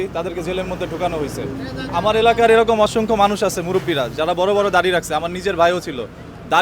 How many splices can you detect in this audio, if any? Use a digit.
0